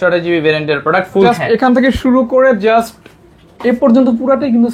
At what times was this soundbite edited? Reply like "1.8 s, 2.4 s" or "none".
1.3 s

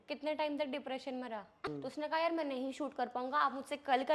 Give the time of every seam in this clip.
1.6 s

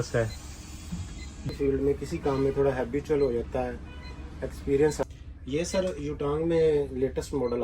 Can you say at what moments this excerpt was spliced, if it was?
1.5 s, 5.0 s

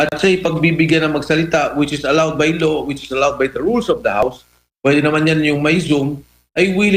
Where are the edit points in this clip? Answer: none

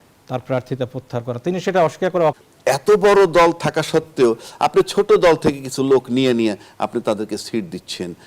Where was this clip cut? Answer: 2.4 s

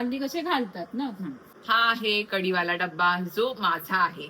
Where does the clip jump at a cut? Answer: 1.5 s

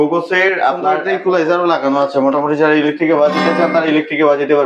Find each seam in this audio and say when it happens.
1.0 s

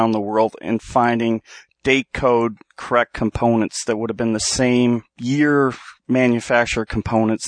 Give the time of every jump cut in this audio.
5.1 s

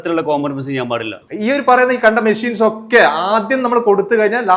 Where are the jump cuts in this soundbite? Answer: 1.2 s

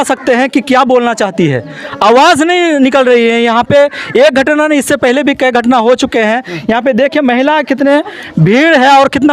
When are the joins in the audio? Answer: none

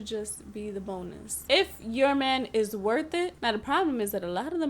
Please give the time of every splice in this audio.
1.4 s, 3.3 s

